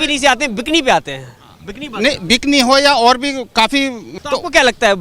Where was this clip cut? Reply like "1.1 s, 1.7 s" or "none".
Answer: 4.0 s